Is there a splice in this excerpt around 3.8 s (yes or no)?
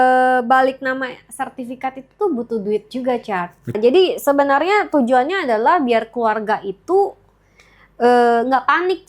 yes